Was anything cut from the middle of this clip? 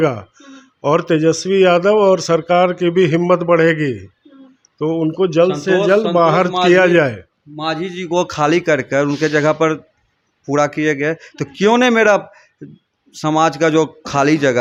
no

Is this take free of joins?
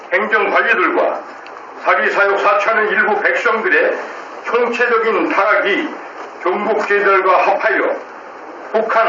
no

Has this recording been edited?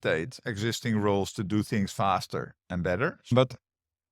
yes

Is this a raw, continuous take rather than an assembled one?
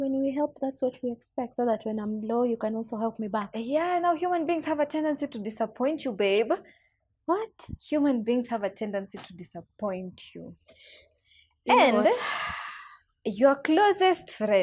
yes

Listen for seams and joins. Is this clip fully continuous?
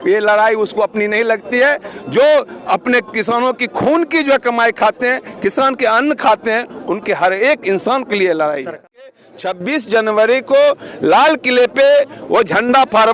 no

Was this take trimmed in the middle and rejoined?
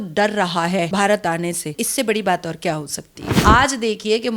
yes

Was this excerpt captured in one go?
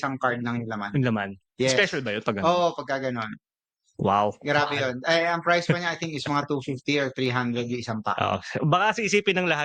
yes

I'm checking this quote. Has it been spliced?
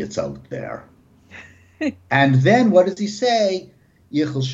yes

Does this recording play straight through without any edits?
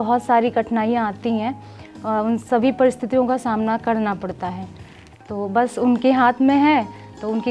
yes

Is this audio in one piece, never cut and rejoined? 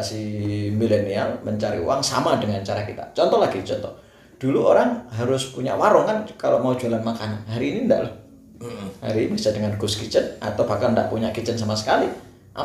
yes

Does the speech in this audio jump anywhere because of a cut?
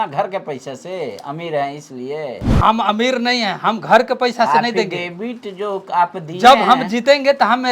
yes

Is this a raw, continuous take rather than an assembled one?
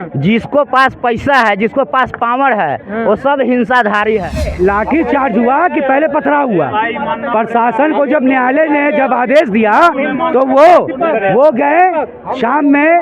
no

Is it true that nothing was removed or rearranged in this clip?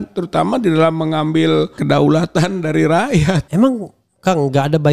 no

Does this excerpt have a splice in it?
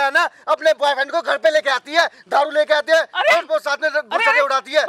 no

